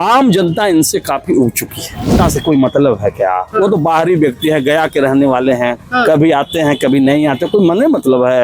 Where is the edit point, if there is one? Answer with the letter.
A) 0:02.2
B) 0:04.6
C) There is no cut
A